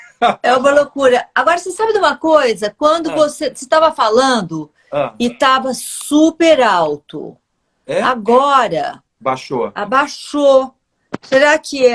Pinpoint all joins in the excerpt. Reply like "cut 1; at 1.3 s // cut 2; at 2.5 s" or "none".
cut 1; at 3.2 s